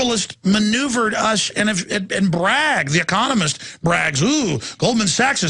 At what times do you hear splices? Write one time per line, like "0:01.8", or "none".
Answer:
0:01.8